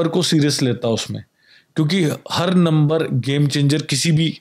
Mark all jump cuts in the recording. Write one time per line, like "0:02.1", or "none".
none